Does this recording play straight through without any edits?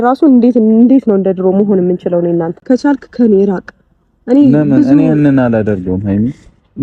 no; 1 cut; at 2.6 s

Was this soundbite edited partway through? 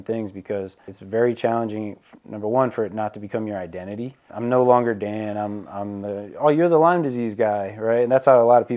yes; 2 cuts; at 0.9 s, 4.3 s

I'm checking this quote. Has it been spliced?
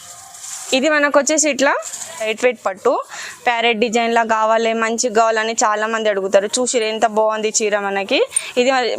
yes; 1 cut; at 2.2 s

